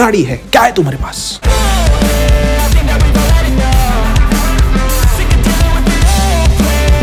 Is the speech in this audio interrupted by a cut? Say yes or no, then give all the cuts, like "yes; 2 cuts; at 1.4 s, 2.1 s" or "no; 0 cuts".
no; 0 cuts